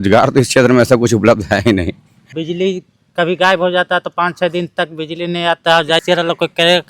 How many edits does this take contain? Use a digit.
2